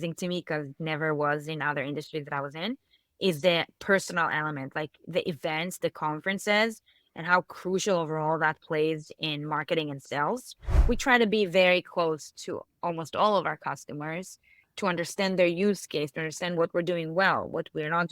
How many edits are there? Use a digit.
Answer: 1